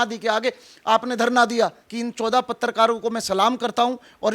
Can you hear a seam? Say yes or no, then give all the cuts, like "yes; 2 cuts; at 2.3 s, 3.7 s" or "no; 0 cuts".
yes; 1 cut; at 1.9 s